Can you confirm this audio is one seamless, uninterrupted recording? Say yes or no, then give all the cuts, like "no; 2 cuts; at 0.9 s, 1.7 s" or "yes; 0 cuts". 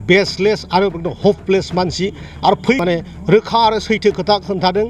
no; 1 cut; at 2.8 s